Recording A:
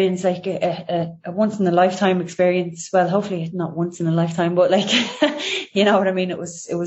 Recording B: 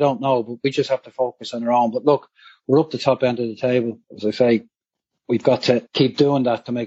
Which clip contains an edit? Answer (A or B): B